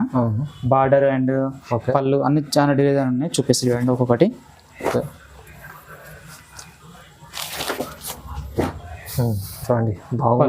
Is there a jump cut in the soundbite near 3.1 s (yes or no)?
no